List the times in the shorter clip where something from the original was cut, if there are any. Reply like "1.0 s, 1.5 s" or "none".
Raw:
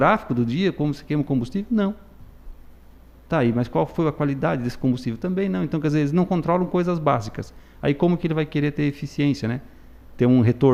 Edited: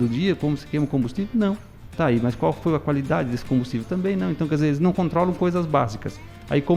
1.8 s